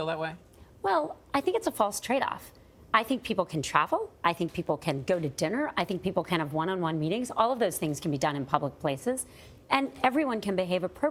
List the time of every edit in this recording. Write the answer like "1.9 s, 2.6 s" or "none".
none